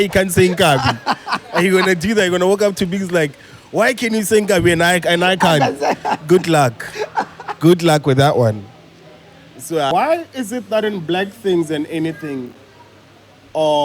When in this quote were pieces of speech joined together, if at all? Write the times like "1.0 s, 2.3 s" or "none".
9.9 s